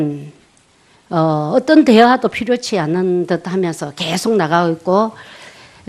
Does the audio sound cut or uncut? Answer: uncut